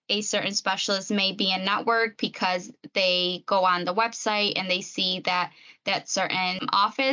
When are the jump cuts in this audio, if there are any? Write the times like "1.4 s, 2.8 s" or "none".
none